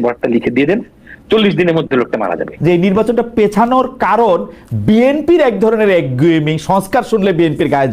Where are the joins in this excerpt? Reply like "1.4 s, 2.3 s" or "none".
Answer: 2.5 s

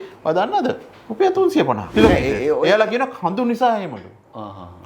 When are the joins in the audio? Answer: 1.8 s

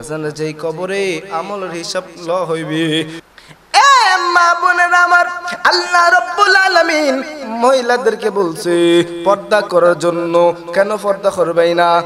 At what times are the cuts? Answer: 3.2 s

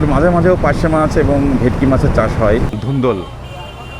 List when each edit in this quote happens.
2.7 s

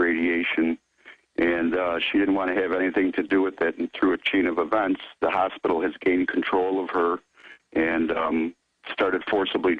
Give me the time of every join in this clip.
5.6 s

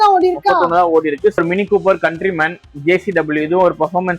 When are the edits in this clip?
1.4 s

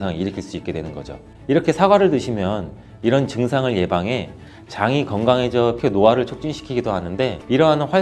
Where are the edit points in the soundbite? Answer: 5.8 s

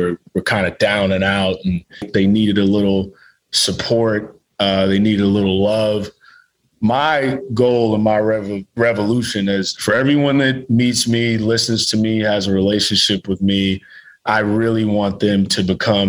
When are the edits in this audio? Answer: 2.1 s, 9.7 s

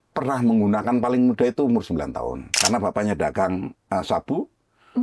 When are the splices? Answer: 2.5 s

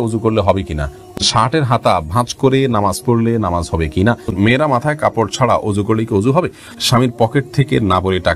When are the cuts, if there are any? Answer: 1.2 s, 4.3 s, 6.7 s

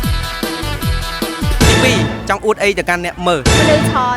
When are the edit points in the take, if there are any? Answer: 1.3 s

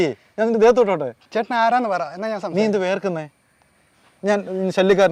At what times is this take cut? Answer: none

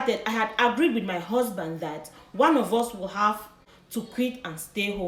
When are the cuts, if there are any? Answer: none

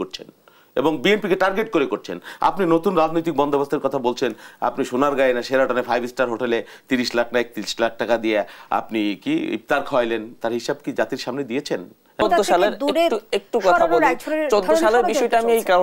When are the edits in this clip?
12.2 s

